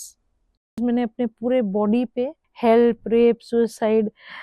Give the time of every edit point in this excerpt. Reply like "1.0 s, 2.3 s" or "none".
0.8 s, 2.4 s

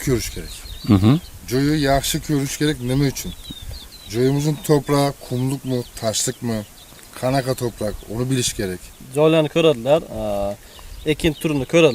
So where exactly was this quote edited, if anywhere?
8.9 s

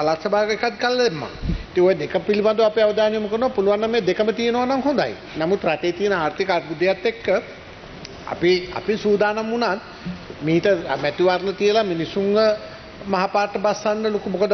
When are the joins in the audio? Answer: none

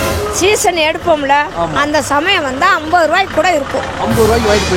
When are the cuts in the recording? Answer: none

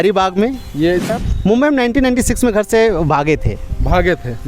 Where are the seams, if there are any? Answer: 1.1 s

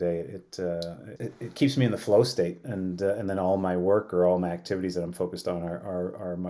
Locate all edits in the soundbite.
1.1 s

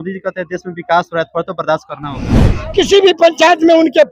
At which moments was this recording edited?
2.4 s

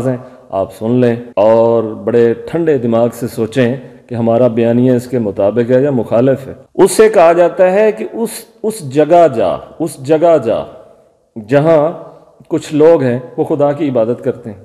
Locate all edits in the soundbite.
none

